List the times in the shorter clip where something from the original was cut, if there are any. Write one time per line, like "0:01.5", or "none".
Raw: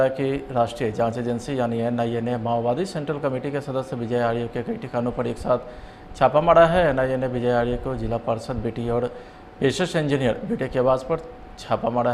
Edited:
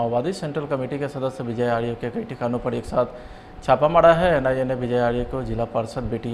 none